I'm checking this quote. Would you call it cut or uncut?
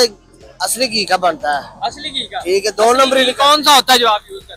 uncut